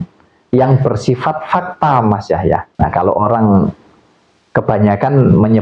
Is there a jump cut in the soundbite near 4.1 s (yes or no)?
no